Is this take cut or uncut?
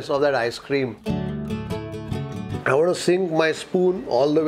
cut